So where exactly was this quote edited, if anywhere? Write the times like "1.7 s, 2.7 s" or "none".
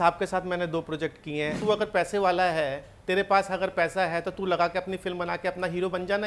1.6 s